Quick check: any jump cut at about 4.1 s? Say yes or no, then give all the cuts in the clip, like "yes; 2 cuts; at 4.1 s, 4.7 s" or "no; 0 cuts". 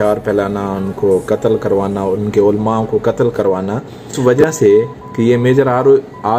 yes; 1 cut; at 4.1 s